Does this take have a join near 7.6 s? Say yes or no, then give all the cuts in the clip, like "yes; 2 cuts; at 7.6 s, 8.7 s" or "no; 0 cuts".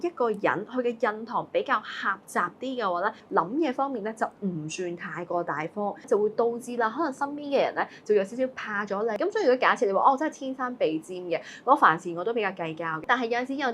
no; 4 cuts; at 3.2 s, 6.0 s, 9.2 s, 13.0 s